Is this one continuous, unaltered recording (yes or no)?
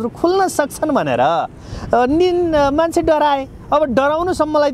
yes